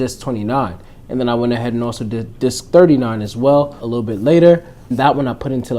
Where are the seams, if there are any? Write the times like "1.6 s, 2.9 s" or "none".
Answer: 2.3 s, 3.8 s, 4.9 s